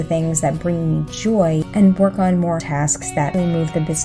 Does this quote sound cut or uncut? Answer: cut